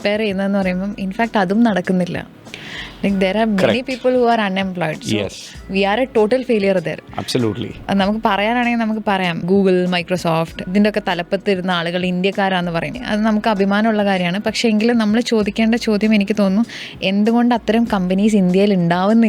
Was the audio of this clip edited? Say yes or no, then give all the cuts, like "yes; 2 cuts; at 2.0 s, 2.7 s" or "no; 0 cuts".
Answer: yes; 4 cuts; at 7.9 s, 9.4 s, 10.6 s, 13.0 s